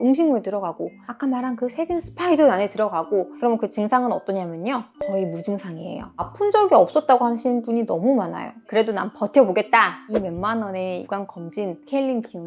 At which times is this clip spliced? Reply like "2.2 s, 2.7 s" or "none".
8.7 s

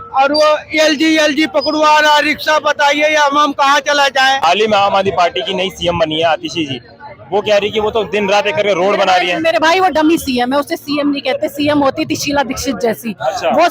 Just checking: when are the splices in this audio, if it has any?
4.4 s

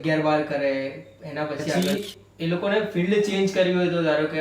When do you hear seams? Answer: 1.8 s

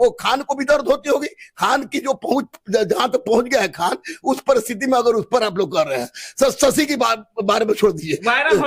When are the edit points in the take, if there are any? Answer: none

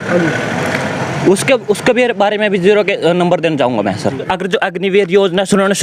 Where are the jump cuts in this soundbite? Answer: 4.2 s

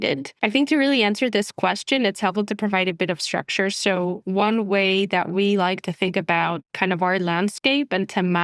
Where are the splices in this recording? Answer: none

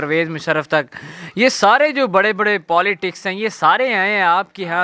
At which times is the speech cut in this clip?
none

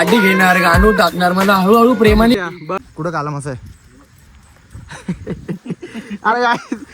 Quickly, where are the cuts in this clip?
2.3 s

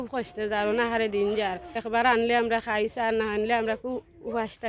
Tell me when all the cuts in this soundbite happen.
1.7 s

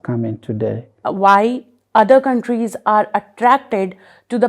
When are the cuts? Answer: 1.0 s

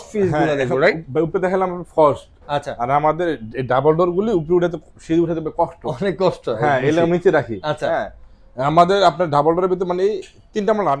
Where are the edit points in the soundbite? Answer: none

